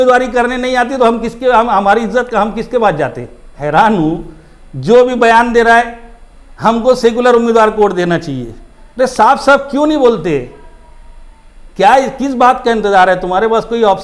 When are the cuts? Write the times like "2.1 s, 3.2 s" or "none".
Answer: 3.6 s

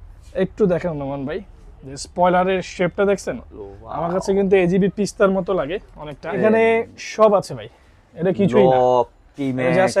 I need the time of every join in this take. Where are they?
6.4 s

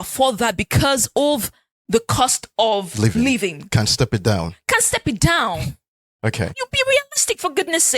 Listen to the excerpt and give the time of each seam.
6.6 s

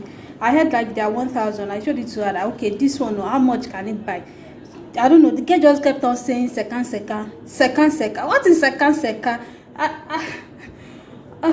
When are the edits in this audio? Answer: none

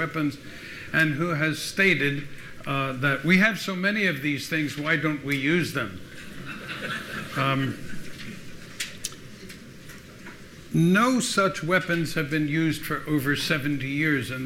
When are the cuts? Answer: 12.3 s

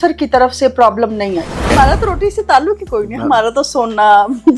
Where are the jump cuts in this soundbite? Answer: 1.7 s

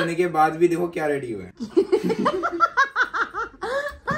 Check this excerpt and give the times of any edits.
none

